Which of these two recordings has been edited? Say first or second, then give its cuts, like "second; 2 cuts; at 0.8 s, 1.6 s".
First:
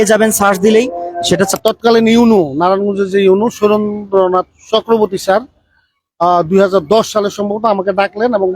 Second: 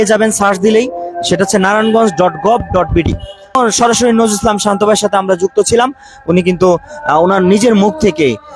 first; 1 cut; at 1.5 s